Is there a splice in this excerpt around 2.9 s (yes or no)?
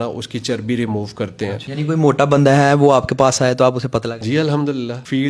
no